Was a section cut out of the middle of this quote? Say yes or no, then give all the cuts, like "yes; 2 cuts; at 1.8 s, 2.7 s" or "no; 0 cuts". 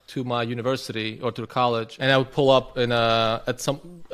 yes; 1 cut; at 1.9 s